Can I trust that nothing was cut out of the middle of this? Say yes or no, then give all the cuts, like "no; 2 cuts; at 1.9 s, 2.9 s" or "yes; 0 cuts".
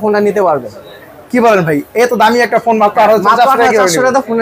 yes; 0 cuts